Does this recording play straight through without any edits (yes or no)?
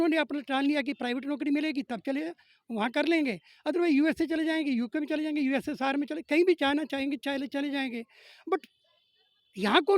yes